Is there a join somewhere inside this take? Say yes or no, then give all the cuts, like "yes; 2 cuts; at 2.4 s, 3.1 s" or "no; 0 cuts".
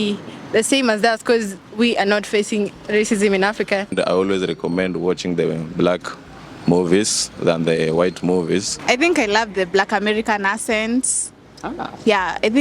yes; 3 cuts; at 1.6 s, 3.9 s, 8.7 s